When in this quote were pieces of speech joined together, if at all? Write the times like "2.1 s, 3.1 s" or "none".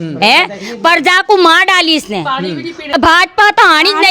2.9 s